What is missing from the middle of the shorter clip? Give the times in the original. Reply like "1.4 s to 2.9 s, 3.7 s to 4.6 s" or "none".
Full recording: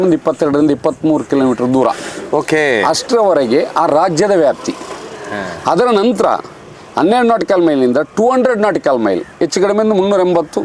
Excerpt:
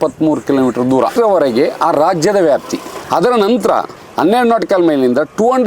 1.9 s to 3.1 s, 4.9 s to 5.5 s, 6.5 s to 6.8 s